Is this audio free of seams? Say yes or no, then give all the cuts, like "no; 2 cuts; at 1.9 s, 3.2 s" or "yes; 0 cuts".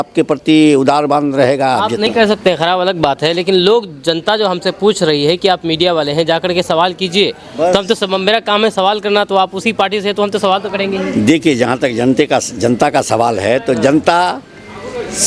yes; 0 cuts